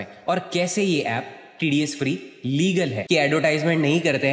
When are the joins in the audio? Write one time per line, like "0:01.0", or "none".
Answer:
0:03.0

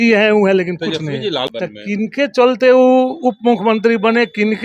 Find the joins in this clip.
0:01.5

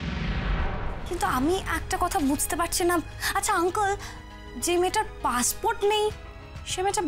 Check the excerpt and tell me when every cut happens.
0:00.9

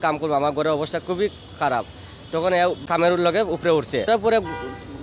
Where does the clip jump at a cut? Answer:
0:02.8
0:04.1

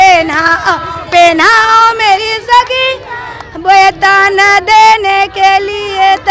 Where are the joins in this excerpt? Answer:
none

